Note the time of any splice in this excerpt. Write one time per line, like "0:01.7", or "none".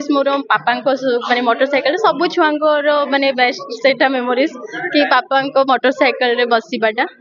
none